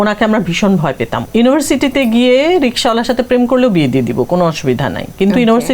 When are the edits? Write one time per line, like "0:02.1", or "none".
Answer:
0:01.2